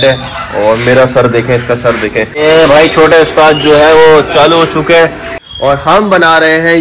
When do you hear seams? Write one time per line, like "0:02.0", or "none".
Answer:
0:02.3
0:05.4